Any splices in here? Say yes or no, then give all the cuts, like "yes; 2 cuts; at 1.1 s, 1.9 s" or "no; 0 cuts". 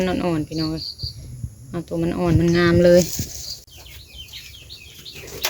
yes; 1 cut; at 3.7 s